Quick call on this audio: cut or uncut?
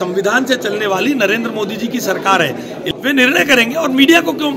cut